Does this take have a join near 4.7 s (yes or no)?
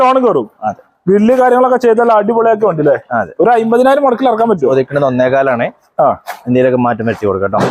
yes